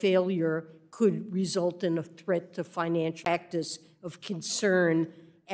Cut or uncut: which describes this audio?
uncut